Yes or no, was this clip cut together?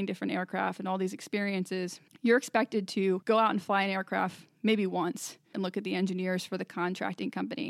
yes